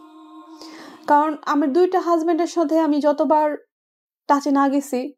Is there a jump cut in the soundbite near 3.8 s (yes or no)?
no